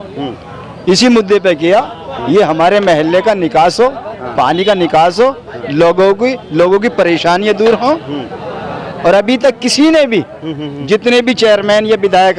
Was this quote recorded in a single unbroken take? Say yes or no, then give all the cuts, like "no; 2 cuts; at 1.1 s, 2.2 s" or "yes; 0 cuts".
yes; 0 cuts